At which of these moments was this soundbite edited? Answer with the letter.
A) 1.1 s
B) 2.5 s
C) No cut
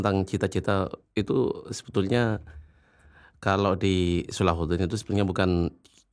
C